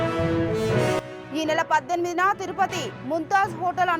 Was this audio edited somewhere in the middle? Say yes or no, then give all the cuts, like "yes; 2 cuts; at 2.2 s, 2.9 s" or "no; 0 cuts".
yes; 1 cut; at 1.1 s